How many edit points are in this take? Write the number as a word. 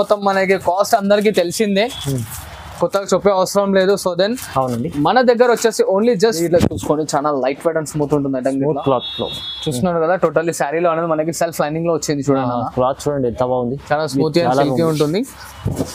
one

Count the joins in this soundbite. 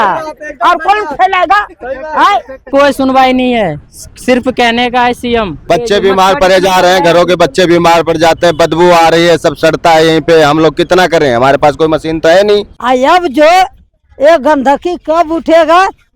three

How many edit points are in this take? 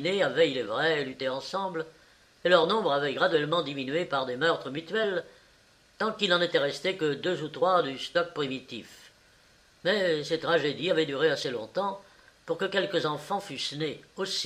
one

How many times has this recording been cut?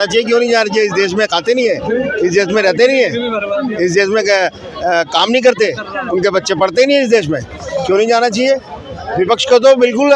zero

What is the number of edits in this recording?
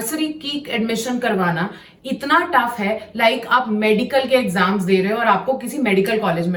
zero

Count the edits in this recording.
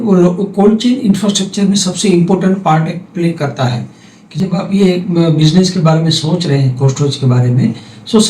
one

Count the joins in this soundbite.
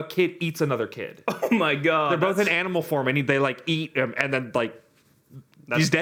zero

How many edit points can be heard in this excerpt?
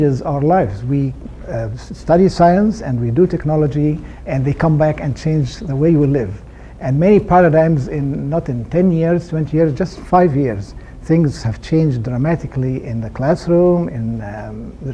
one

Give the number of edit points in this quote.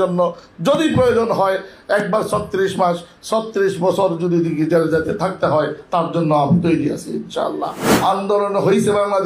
one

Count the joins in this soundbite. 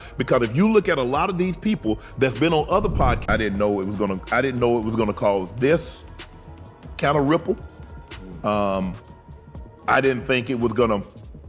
one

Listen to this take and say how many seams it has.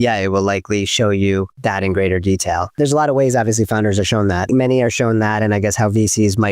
three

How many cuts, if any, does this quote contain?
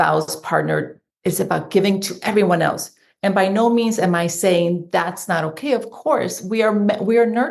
one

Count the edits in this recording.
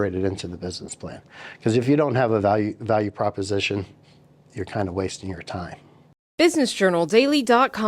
one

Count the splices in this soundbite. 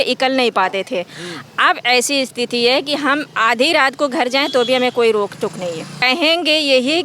one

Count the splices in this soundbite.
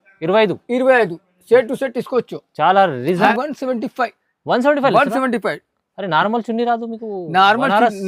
one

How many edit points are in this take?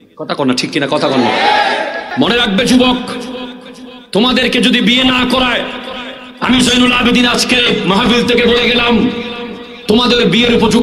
one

